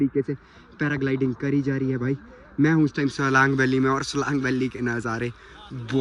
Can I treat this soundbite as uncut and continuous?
yes; 0 cuts

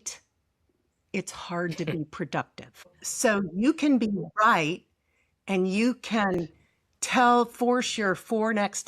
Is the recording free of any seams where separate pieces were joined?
no; 1 cut; at 3.0 s

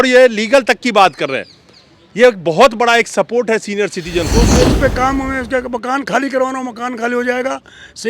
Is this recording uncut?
no; 1 cut; at 4.5 s

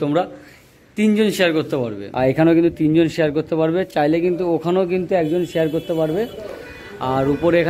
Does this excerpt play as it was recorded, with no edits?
no; 1 cut; at 2.1 s

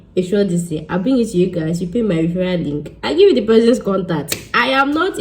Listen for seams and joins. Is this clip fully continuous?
yes; 0 cuts

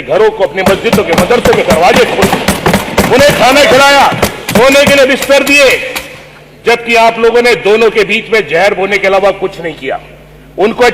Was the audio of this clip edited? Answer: no; 0 cuts

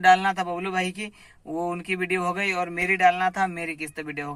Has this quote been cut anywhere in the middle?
no; 0 cuts

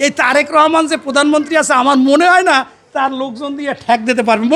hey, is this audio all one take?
yes; 0 cuts

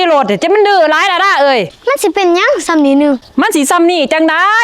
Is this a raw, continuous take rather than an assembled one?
yes; 0 cuts

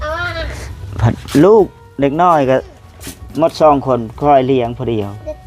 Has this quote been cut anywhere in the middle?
no; 0 cuts

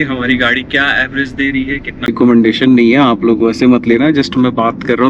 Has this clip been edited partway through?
yes; 1 cut; at 2.1 s

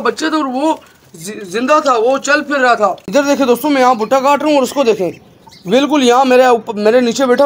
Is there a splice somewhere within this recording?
yes; 1 cut; at 3.0 s

